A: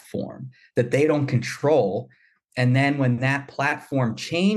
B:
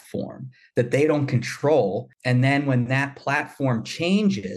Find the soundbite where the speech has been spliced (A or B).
B